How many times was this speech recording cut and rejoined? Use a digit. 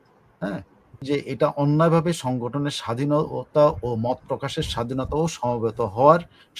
1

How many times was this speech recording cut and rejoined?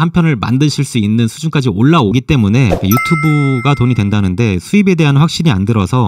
1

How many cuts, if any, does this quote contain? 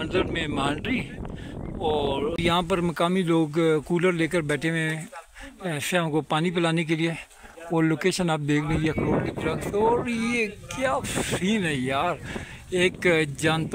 1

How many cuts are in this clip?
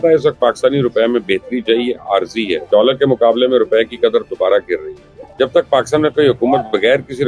2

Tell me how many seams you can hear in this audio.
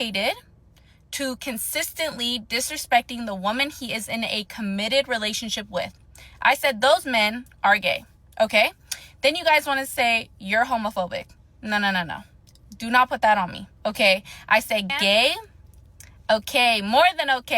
2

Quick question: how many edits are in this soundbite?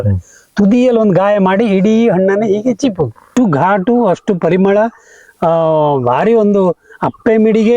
1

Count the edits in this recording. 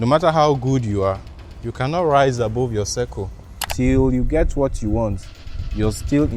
1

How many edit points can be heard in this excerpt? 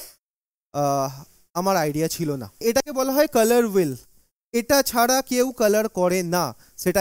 1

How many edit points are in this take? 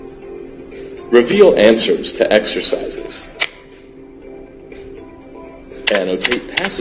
1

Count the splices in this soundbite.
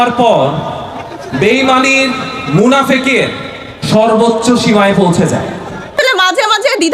1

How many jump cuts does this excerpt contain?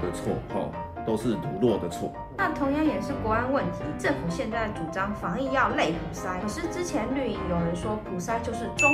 0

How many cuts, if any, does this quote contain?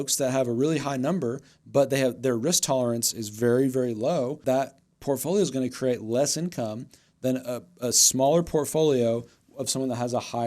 1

